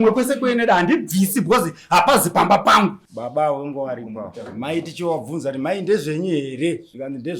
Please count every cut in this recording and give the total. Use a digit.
1